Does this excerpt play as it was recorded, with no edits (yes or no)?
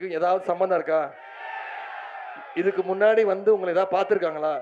yes